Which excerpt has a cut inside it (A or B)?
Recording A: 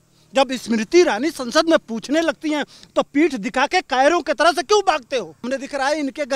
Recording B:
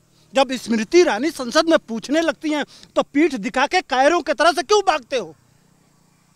A